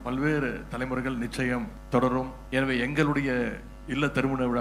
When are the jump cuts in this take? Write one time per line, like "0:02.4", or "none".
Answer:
0:01.8
0:02.4

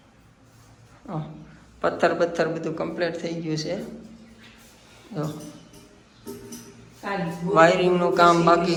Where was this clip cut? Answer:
none

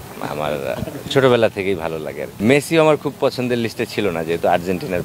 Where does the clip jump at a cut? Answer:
0:02.4

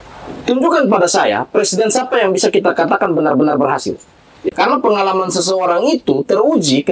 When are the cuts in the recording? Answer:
0:04.4

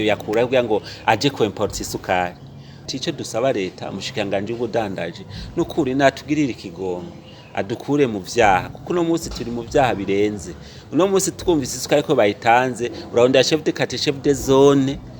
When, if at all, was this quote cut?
0:02.8

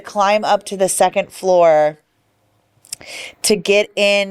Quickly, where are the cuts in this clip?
none

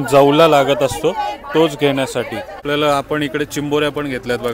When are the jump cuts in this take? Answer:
0:02.6

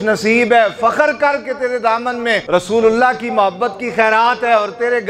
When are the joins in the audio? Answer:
0:02.4

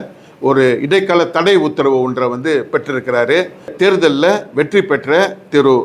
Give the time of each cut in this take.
0:03.7

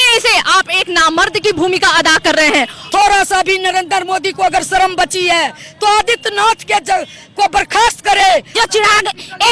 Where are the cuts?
0:02.8
0:08.5

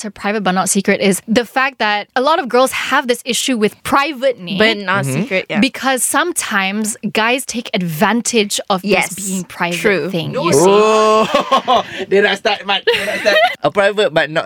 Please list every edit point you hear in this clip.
0:01.2
0:13.6

